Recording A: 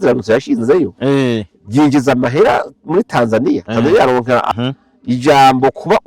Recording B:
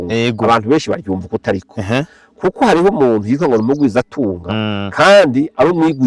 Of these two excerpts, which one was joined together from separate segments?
A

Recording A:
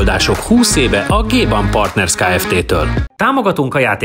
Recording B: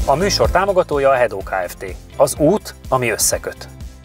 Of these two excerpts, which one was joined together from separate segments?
A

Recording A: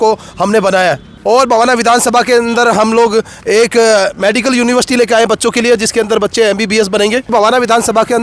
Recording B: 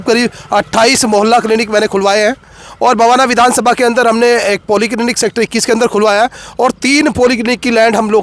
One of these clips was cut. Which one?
A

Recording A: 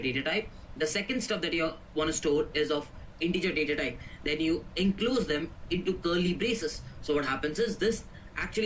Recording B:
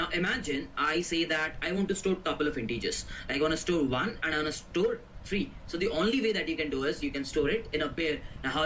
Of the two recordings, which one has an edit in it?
B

